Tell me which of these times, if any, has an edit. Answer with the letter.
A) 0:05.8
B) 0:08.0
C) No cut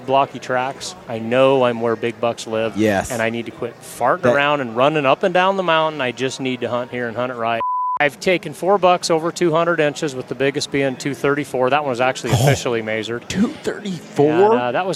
B